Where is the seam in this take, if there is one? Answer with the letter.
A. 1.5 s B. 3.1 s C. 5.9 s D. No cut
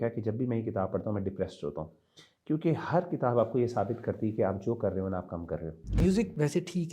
C